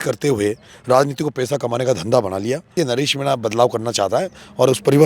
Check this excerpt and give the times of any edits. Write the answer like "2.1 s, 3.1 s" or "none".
2.8 s